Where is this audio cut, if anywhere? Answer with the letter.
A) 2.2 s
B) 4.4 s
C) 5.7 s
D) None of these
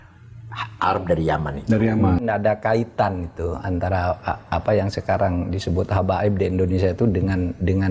A